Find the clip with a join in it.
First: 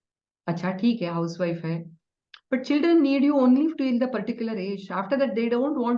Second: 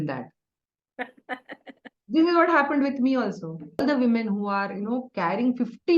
second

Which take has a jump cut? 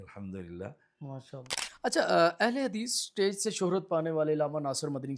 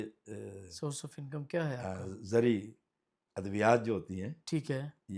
first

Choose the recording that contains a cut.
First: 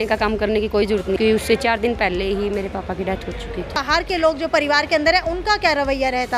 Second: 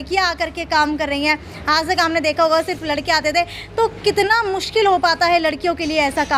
first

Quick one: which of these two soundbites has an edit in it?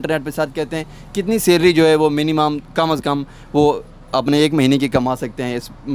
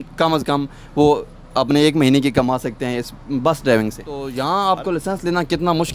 second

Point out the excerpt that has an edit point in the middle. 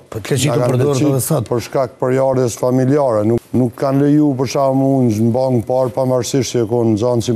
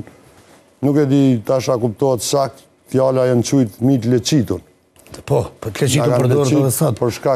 first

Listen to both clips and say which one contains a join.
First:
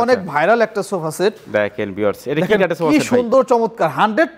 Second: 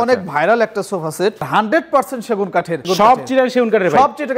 second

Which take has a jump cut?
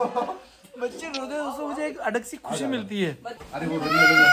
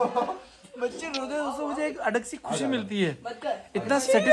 first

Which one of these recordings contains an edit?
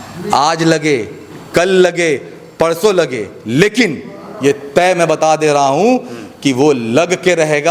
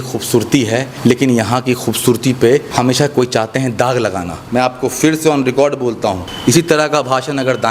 second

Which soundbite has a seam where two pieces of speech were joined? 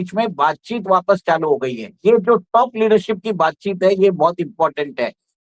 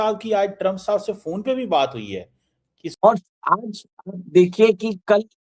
second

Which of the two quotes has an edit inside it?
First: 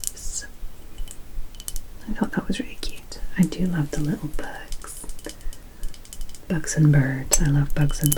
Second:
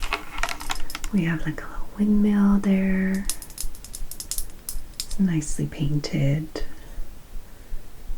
second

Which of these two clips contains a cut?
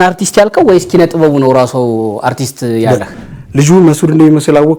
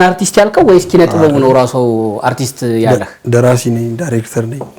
first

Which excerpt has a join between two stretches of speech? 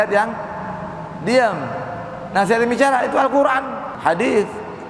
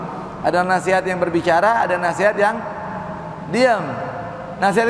first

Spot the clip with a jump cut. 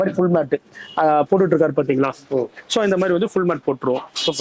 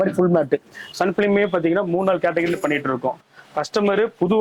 second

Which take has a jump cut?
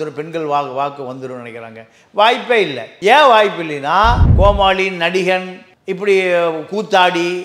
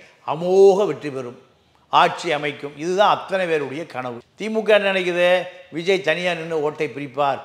first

